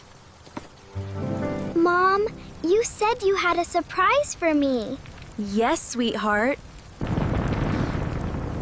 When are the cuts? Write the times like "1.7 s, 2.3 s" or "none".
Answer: 1.7 s